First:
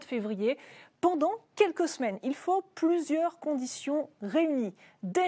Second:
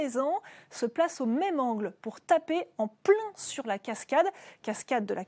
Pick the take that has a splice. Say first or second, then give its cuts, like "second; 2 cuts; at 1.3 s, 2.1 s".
first; 1 cut; at 3.2 s